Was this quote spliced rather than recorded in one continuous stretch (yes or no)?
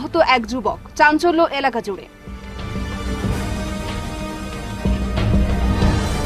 no